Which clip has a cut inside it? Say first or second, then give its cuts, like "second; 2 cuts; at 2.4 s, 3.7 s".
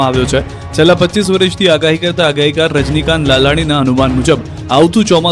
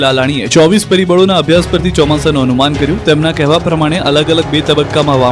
first; 1 cut; at 1.2 s